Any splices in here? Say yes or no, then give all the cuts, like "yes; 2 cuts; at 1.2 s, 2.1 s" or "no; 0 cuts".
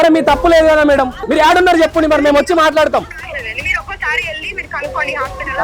yes; 1 cut; at 1.2 s